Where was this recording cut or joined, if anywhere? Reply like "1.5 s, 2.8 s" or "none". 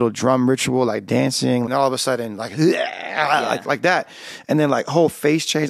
1.7 s